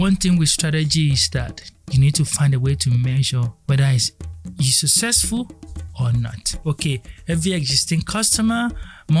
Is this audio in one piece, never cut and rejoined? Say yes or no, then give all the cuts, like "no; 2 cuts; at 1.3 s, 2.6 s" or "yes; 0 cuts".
no; 2 cuts; at 3.5 s, 6.5 s